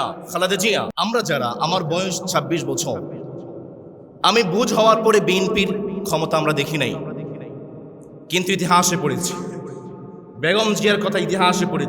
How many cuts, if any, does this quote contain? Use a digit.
1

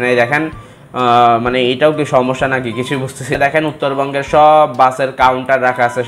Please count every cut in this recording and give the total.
1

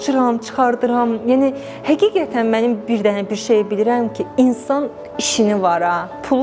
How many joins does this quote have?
0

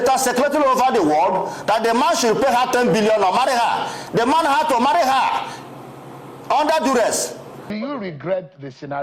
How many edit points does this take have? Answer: 1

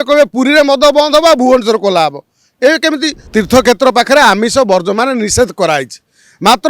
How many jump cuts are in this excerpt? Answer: 1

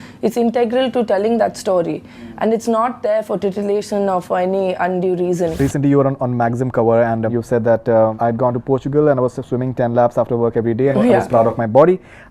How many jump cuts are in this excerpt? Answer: 3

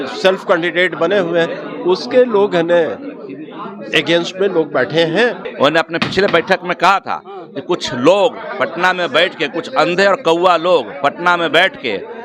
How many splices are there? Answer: 1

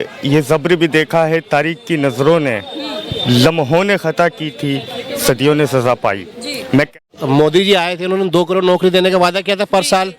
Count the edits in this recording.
1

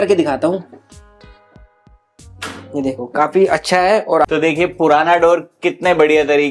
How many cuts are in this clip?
1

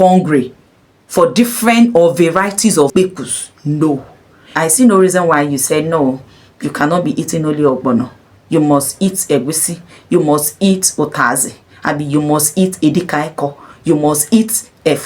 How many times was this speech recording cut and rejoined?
2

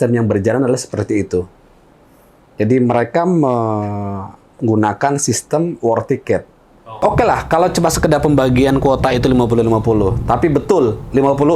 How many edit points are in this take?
1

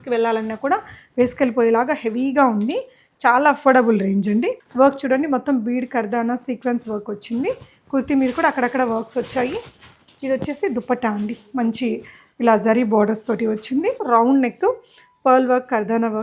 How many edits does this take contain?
2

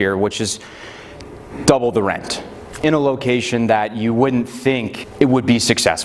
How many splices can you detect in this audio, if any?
2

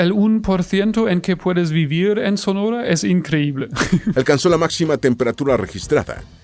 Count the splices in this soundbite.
1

